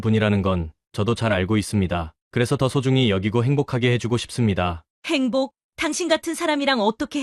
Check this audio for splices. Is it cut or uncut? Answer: uncut